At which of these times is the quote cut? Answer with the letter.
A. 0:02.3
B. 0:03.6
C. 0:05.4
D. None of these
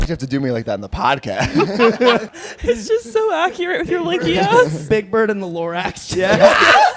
A